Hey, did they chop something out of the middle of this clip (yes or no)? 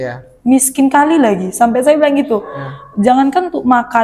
no